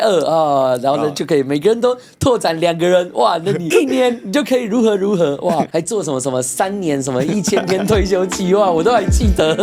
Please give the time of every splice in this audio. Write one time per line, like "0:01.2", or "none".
none